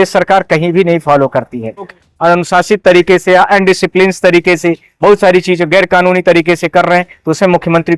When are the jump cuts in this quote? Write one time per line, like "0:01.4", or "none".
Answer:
0:01.9